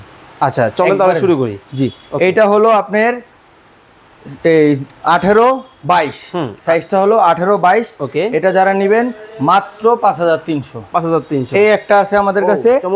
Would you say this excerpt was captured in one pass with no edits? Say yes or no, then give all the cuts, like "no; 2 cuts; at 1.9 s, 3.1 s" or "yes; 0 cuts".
yes; 0 cuts